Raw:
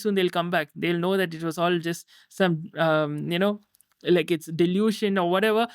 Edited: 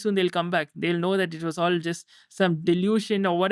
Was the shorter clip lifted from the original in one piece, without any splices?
no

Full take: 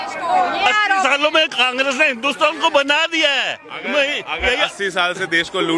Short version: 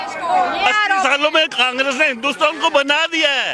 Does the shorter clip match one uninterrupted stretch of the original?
yes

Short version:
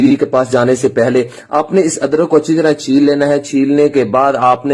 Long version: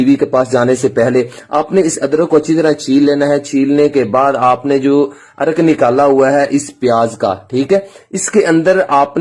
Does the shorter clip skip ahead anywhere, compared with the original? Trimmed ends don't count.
no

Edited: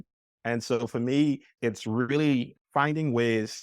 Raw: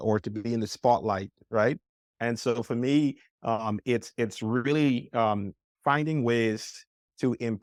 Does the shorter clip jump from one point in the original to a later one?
yes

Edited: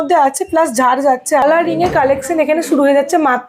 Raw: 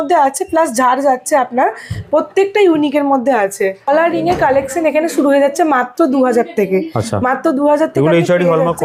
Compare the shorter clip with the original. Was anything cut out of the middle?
yes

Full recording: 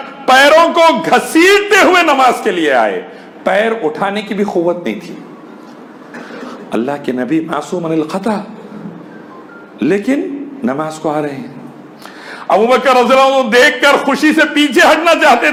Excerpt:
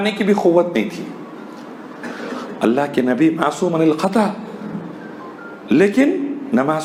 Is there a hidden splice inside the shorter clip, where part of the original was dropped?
no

